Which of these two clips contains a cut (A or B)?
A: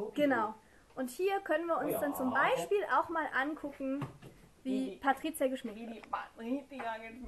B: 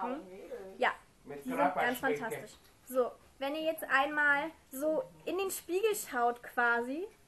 B